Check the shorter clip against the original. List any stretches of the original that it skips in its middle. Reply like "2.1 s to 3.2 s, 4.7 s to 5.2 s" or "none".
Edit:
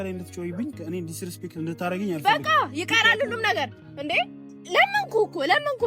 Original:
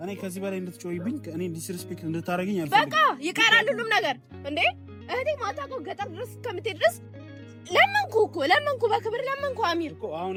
4.9 s to 7.5 s

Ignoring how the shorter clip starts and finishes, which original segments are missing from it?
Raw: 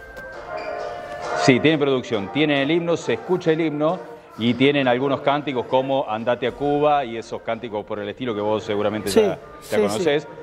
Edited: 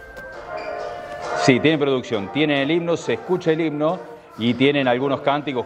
none

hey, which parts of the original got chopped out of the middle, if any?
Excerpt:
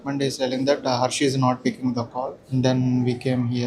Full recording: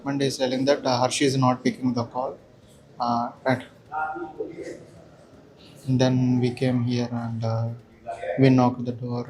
2.4 s to 5.8 s

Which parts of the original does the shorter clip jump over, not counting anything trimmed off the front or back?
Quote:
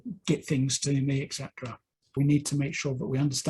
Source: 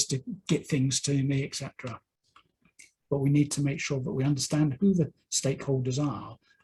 2.4 s to 3.2 s

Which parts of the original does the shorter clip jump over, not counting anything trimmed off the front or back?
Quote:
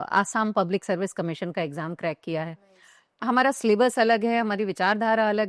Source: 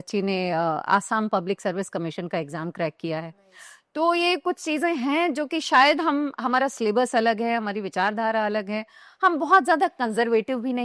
3.9 s to 6.3 s

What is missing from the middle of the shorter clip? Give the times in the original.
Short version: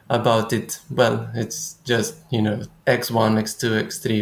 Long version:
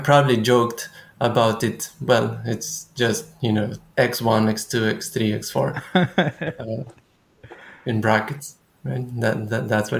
none

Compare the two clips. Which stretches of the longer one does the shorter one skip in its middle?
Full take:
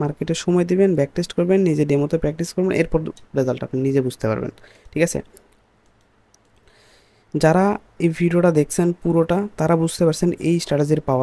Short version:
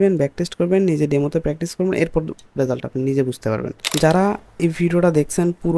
4.6 s to 7.2 s

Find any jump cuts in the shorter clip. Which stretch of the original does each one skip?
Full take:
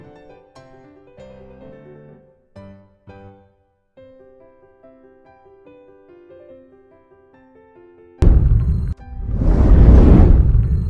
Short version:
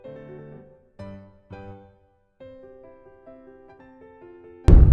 5.3 s to 7.2 s

